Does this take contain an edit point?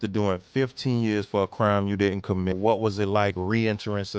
yes; 1 cut; at 2.5 s

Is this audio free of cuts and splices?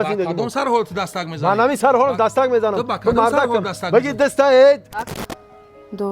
no; 1 cut; at 5.1 s

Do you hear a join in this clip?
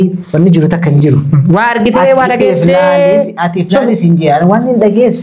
no; 0 cuts

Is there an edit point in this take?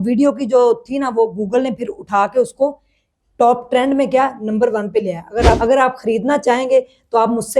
yes; 1 cut; at 5.6 s

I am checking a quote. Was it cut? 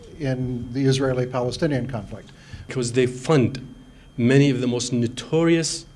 yes; 1 cut; at 2.7 s

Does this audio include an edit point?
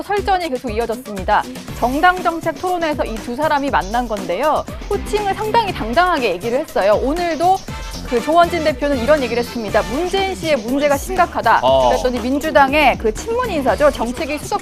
no; 0 cuts

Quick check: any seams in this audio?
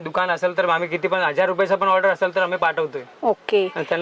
no; 0 cuts

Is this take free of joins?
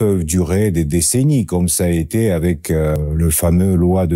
no; 1 cut; at 3.0 s

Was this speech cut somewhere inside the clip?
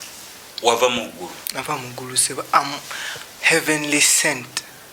no; 0 cuts

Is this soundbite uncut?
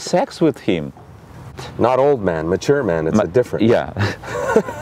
no; 1 cut; at 1.7 s

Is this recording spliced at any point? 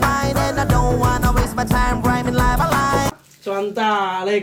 no; 0 cuts

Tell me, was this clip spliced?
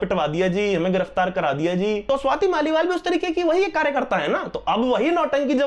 yes; 1 cut; at 2.0 s

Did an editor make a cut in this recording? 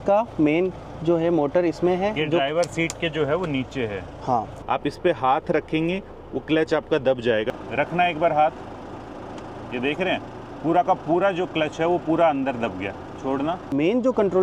yes; 3 cuts; at 4.6 s, 7.5 s, 13.7 s

